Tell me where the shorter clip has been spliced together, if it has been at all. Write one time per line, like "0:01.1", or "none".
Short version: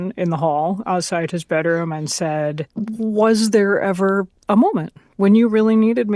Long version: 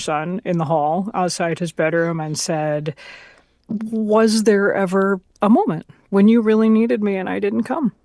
0:02.7